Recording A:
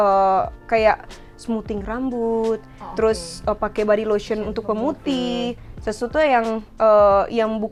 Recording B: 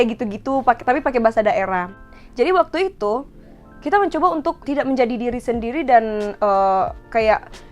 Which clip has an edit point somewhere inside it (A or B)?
B